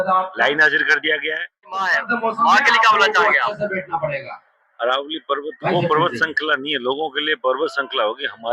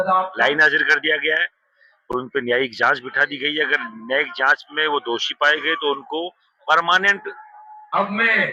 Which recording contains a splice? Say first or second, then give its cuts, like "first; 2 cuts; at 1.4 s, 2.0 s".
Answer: first; 1 cut; at 2.0 s